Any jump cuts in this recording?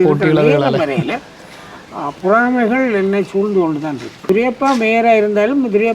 yes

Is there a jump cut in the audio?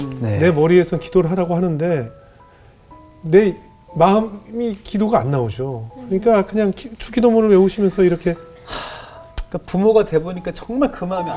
no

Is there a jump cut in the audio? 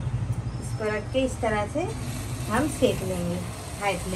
no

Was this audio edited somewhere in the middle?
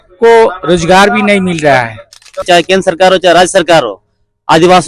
yes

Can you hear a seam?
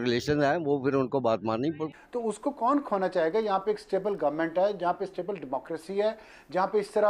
yes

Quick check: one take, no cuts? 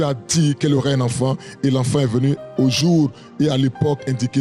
yes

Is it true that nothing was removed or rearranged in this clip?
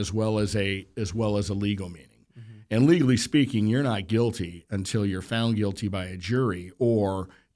yes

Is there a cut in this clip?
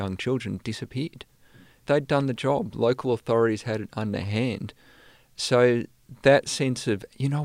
yes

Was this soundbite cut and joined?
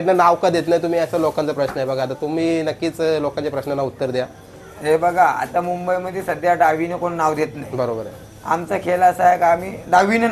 no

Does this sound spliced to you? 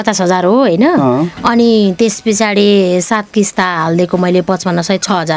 no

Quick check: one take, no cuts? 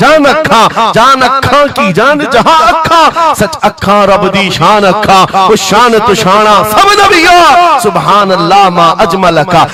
yes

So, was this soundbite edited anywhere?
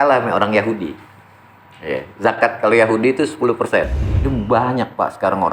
yes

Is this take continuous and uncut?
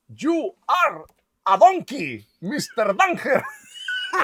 yes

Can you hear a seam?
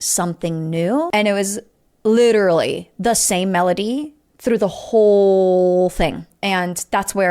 yes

